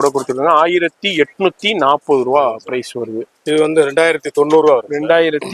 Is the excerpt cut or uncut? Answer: cut